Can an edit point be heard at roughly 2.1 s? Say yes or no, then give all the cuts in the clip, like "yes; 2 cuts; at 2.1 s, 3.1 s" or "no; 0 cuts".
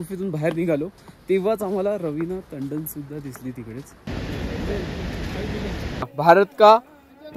no; 2 cuts; at 4.1 s, 6.0 s